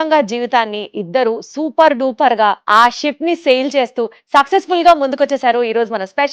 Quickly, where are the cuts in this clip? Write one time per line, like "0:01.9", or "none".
0:02.6